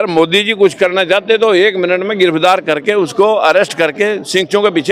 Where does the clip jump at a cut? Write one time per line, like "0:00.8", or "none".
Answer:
none

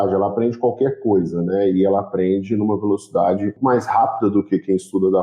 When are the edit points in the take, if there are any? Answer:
0:03.6

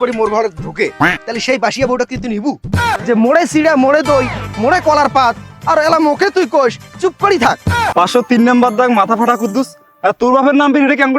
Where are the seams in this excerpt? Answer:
0:03.0
0:07.9

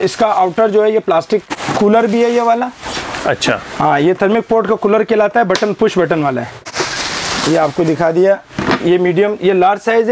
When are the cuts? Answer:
0:01.4
0:06.7

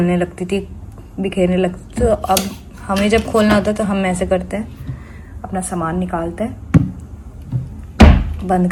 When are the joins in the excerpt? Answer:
none

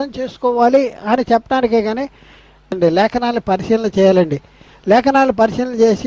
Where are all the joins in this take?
0:02.8

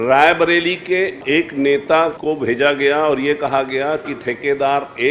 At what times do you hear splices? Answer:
0:01.2
0:02.2

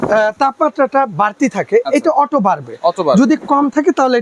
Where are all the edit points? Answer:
none

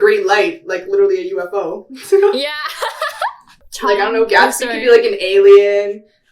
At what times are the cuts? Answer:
0:03.7

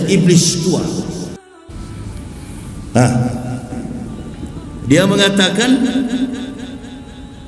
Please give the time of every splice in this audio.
0:01.4

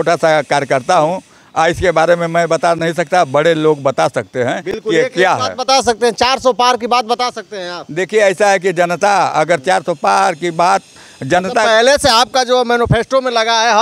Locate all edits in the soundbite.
none

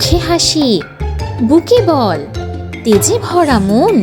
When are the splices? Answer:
none

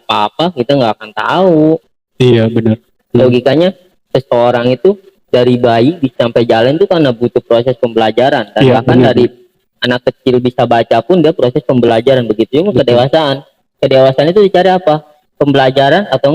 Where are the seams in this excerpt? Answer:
0:02.9

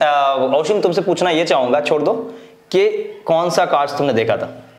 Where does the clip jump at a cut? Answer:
none

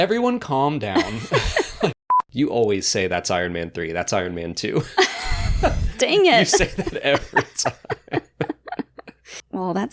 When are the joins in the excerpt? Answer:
0:02.0

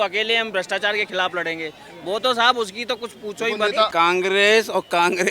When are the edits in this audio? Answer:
0:03.9

